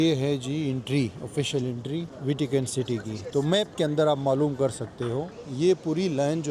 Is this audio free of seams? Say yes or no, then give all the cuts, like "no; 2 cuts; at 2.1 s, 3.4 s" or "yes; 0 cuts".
no; 2 cuts; at 2.1 s, 5.3 s